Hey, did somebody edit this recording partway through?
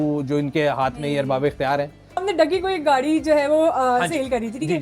yes; 1 cut; at 2.2 s

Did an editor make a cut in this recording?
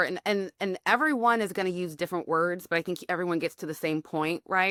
no; 0 cuts

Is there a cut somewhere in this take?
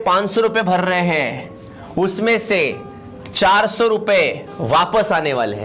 no; 0 cuts

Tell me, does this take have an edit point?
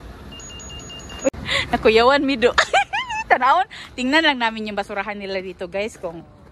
no; 0 cuts

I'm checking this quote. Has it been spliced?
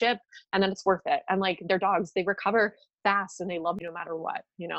yes; 1 cut; at 3.8 s

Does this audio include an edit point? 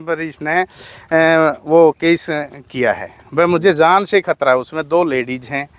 no; 0 cuts

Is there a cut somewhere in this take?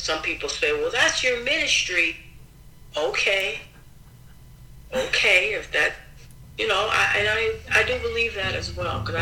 no; 0 cuts

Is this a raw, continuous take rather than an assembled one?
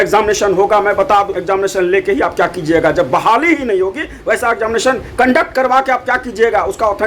yes; 0 cuts

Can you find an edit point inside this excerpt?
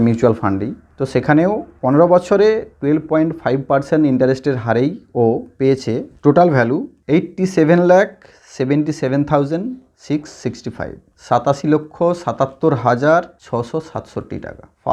no; 0 cuts

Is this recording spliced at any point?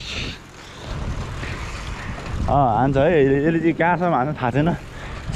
no; 0 cuts

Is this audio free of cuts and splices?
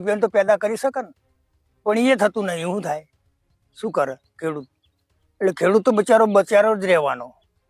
yes; 0 cuts

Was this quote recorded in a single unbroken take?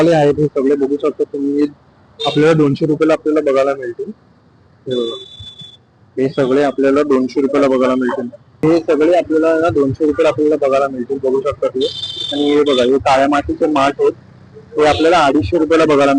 yes; 0 cuts

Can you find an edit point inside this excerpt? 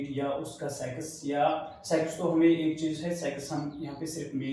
no; 0 cuts

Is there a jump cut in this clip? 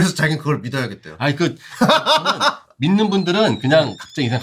no; 0 cuts

